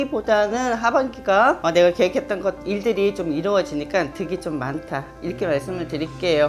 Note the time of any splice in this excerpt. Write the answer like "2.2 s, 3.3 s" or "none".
1.6 s